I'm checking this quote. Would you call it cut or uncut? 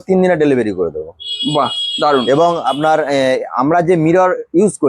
uncut